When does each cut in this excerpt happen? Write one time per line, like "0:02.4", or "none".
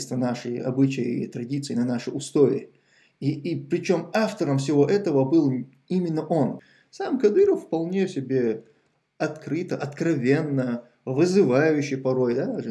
0:06.6